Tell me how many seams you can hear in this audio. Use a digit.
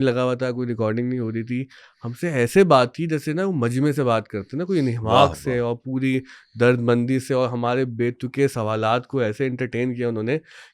0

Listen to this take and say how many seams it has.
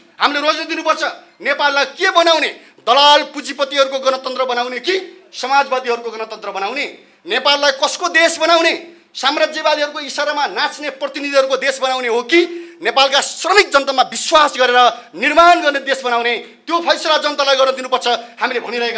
0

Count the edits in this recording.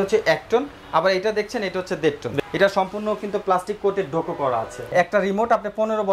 2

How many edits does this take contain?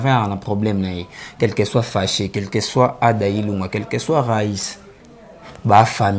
0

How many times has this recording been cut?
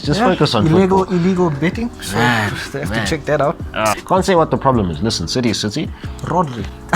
1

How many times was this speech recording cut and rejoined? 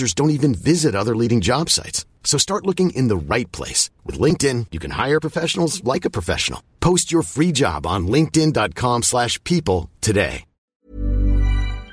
1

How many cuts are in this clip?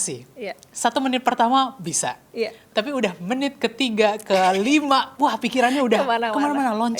0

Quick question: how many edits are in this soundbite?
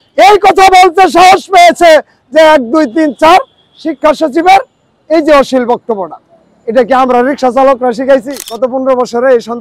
1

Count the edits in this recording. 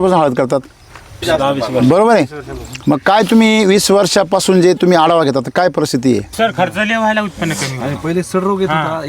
3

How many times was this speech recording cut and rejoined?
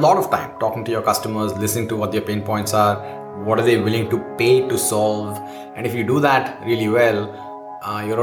0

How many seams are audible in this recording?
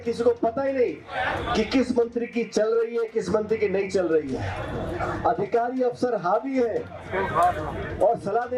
0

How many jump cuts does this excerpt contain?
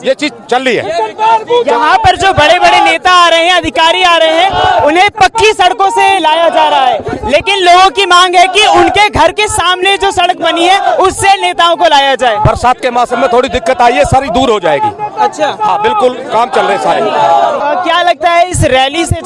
1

